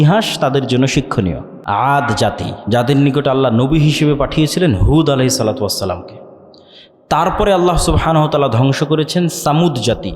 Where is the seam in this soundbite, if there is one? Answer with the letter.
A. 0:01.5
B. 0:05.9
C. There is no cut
A